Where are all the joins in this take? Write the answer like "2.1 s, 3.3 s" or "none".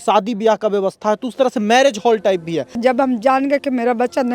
2.8 s